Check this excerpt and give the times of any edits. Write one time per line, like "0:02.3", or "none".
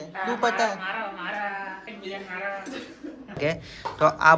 0:03.4